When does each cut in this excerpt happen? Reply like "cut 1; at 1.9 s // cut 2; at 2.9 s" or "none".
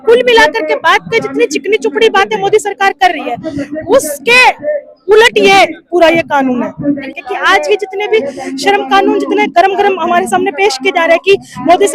cut 1; at 7.0 s